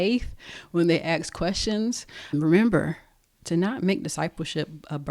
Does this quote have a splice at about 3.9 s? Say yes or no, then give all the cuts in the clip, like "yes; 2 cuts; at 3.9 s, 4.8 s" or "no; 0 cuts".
no; 1 cut; at 2.3 s